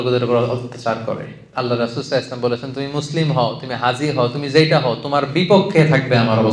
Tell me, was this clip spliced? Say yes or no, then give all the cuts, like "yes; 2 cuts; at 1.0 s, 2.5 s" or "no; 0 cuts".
yes; 1 cut; at 1.4 s